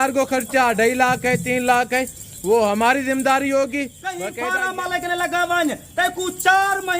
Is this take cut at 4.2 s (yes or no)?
yes